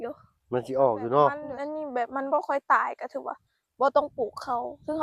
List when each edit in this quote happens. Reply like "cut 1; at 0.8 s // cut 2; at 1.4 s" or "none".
cut 1; at 1.5 s